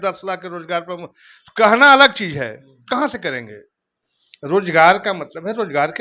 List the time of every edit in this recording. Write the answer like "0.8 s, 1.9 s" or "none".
none